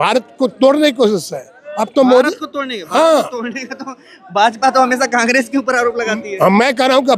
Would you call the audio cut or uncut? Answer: uncut